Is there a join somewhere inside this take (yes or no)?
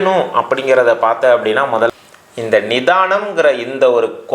yes